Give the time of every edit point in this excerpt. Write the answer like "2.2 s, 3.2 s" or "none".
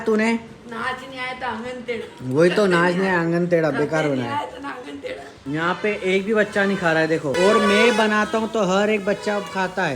5.4 s, 7.3 s